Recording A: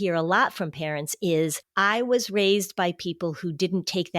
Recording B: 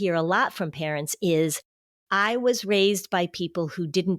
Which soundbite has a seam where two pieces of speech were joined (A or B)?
A